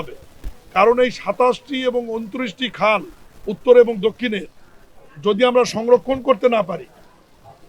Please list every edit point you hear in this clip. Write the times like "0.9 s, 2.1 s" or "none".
none